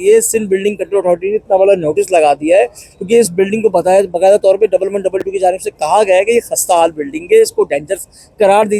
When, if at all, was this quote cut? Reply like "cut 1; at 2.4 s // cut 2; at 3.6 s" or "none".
none